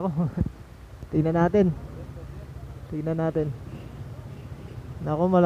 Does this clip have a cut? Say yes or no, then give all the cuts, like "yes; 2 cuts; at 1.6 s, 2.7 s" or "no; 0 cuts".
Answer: no; 0 cuts